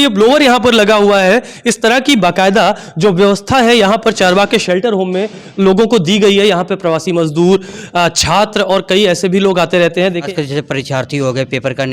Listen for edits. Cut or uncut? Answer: cut